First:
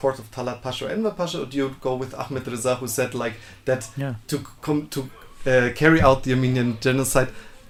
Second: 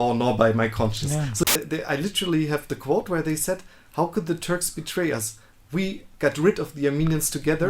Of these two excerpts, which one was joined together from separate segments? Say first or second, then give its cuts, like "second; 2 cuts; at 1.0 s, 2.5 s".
second; 1 cut; at 1.4 s